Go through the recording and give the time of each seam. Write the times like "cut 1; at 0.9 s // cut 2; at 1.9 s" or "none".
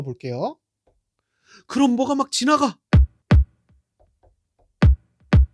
cut 1; at 3.1 s